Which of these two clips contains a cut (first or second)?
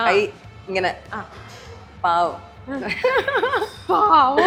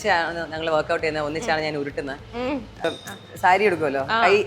second